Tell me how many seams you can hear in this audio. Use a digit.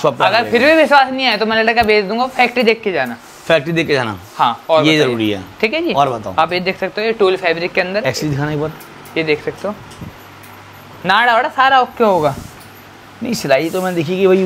0